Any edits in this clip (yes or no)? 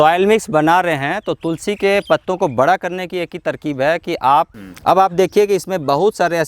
yes